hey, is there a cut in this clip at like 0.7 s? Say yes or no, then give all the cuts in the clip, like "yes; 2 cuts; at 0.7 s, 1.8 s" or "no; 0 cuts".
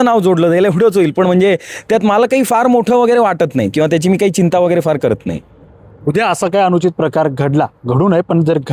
no; 0 cuts